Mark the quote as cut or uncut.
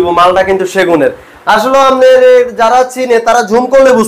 uncut